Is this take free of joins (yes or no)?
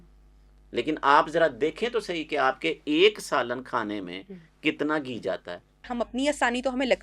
no